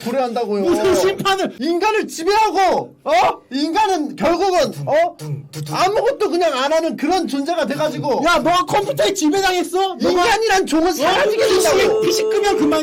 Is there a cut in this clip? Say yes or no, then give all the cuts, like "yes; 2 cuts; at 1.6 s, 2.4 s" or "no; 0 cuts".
yes; 1 cut; at 1.5 s